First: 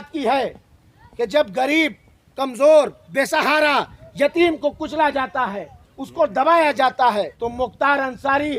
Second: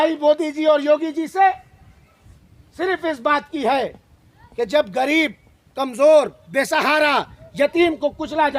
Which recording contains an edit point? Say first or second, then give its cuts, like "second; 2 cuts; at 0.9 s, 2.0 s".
first; 1 cut; at 7.4 s